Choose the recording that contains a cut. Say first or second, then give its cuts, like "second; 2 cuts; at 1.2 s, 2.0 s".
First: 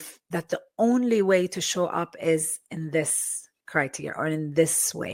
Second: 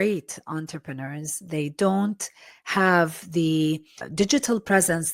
second; 1 cut; at 4.0 s